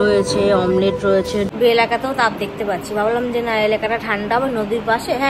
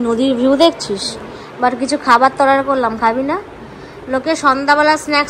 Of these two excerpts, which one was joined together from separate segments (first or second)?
first